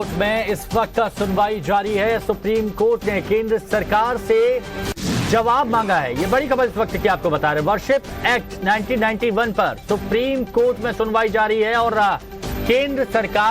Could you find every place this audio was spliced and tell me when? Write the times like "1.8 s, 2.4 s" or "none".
6.7 s